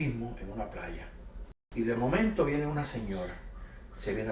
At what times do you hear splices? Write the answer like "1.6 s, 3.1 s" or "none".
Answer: 1.6 s